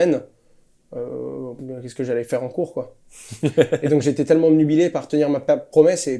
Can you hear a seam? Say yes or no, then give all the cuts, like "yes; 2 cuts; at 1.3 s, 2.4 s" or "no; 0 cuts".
no; 0 cuts